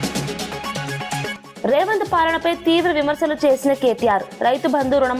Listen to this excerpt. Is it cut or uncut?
uncut